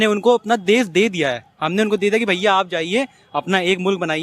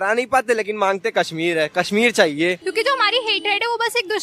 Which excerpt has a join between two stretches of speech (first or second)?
second